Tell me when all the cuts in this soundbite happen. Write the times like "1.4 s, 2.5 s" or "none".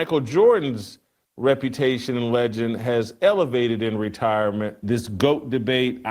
4.8 s